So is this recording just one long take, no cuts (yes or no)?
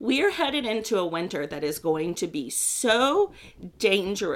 yes